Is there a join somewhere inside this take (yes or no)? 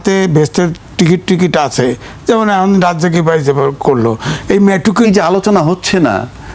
yes